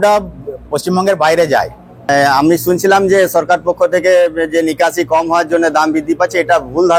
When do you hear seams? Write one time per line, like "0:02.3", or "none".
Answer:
0:02.1